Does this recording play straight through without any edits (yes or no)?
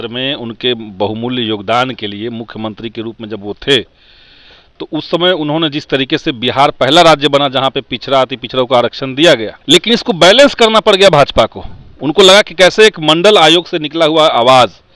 no